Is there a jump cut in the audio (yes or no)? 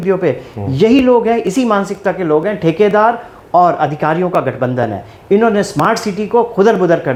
no